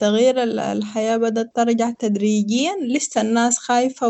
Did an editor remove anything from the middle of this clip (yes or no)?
no